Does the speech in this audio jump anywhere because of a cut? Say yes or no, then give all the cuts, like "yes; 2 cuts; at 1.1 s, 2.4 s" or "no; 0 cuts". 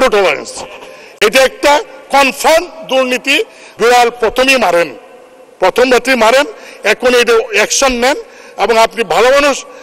yes; 1 cut; at 3.6 s